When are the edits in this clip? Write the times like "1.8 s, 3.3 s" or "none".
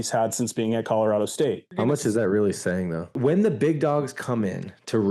1.7 s, 3.1 s

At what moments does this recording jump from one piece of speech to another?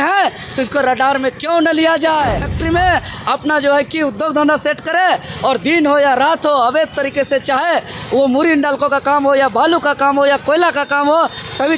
2.5 s

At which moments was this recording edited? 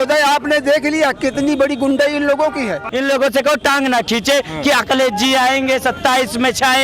2.8 s

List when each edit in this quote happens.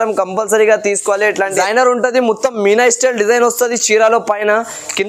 1.6 s

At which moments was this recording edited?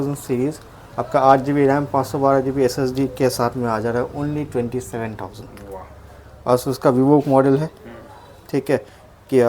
none

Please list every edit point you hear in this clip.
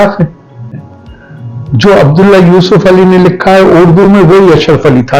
1.0 s

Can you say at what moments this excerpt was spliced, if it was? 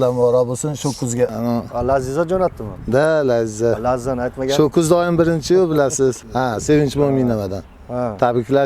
1.3 s, 6.2 s

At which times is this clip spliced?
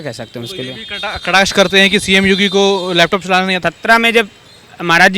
3.5 s

